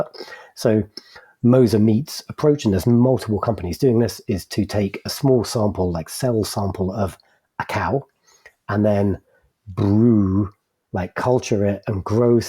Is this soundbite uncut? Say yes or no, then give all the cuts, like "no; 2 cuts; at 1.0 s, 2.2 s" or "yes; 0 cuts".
yes; 0 cuts